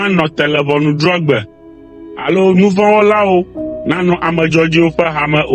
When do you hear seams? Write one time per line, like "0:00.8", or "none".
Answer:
none